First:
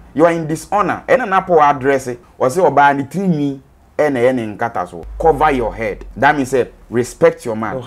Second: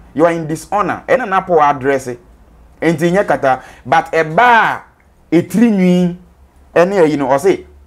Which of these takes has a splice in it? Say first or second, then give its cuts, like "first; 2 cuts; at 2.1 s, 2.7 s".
first; 3 cuts; at 2.2 s, 5.1 s, 6.0 s